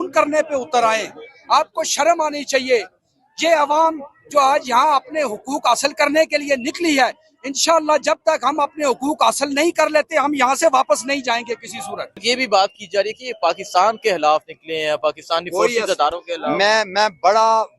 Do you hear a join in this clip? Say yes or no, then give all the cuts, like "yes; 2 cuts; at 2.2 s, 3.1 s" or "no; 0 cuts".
yes; 1 cut; at 12.2 s